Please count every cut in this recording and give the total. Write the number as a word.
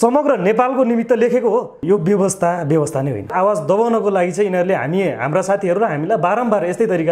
two